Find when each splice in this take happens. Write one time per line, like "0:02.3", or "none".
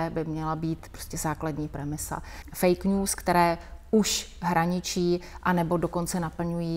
0:02.3